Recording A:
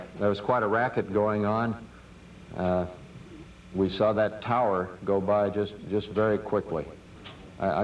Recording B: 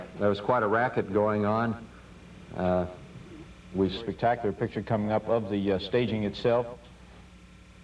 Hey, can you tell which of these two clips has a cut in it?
A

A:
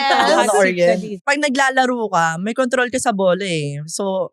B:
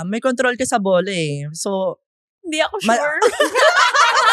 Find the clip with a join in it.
A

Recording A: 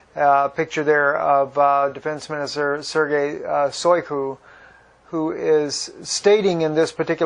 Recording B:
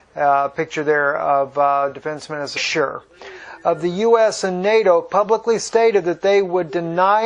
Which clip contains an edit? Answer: A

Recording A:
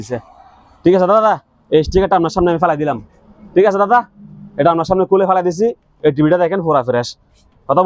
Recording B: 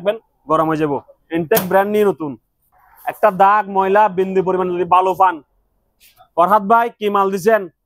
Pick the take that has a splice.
B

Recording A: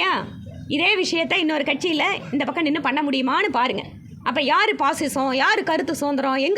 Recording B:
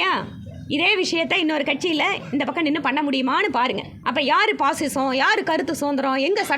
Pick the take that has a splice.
B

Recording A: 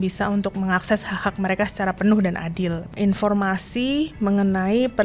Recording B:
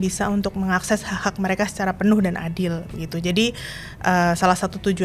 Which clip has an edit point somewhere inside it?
A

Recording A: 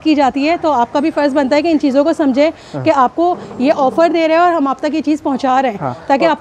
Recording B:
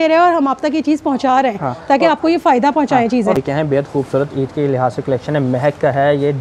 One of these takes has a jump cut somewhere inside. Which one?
B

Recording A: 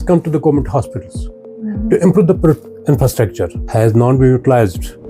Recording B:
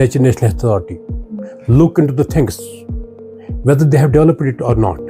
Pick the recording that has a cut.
A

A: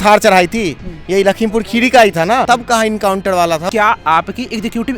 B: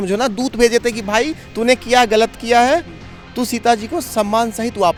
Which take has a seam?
A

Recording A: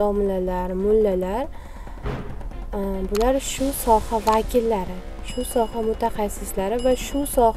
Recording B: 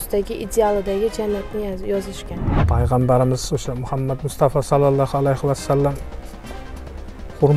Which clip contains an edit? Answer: B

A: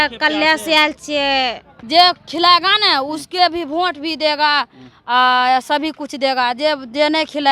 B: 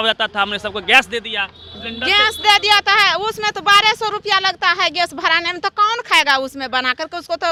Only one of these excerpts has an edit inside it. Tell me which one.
A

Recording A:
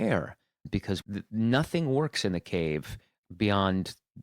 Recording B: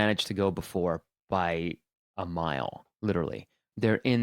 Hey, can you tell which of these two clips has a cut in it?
A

